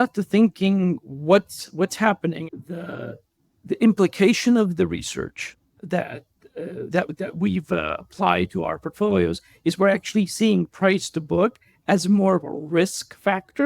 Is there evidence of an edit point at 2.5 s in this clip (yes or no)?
yes